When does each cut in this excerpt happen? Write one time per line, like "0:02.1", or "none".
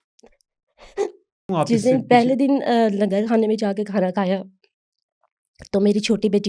0:01.5